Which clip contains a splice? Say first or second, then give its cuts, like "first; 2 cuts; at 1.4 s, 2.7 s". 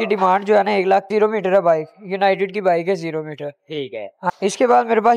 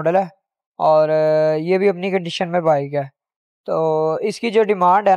first; 2 cuts; at 1.1 s, 4.2 s